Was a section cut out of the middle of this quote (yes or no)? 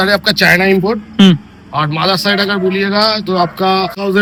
no